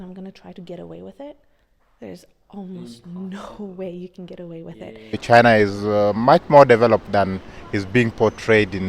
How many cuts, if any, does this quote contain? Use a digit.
1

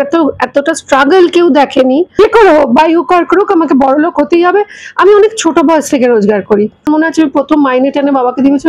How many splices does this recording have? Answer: 2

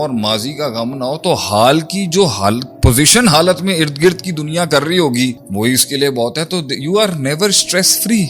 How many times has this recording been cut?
0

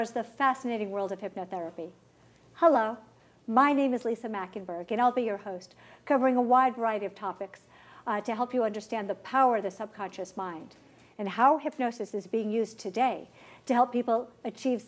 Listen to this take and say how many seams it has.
1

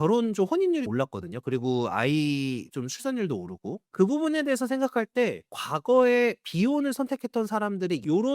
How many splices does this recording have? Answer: 0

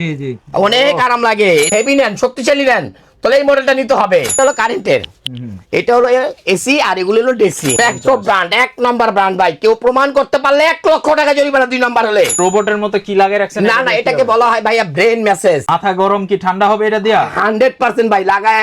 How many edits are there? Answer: 5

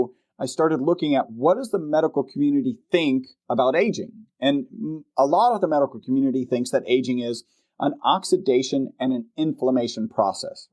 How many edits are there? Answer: 0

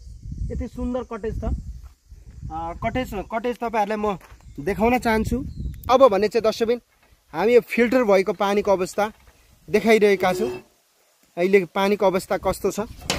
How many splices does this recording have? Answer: 1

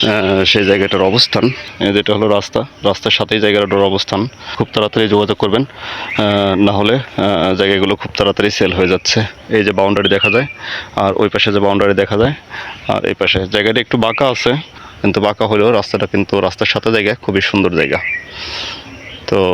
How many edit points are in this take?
4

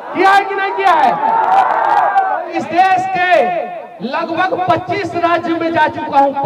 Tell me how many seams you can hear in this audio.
1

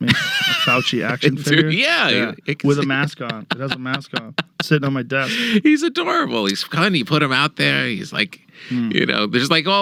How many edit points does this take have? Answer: 0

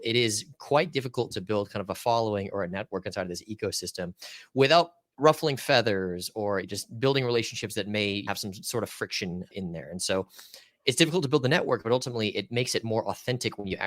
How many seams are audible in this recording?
4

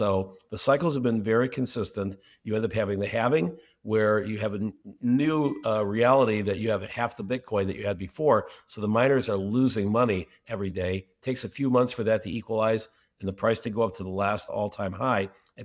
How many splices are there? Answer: 1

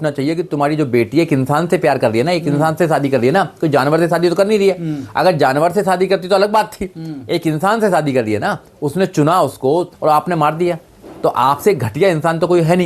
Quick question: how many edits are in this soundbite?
0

